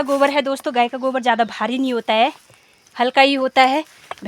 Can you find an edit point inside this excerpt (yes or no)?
no